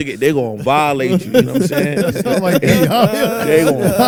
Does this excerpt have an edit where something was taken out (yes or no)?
no